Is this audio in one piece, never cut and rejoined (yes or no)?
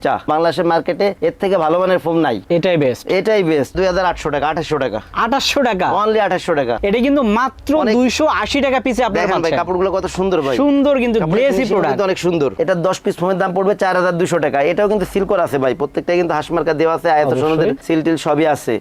no